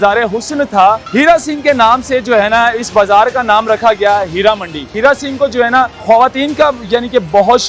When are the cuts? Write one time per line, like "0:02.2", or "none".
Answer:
0:01.0
0:04.9
0:06.0